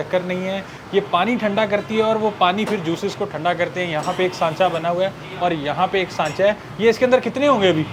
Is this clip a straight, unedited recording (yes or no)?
yes